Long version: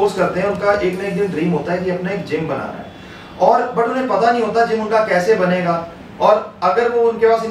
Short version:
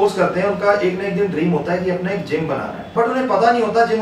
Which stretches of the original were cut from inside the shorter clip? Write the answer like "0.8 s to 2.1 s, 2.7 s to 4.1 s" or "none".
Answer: 2.9 s to 3.7 s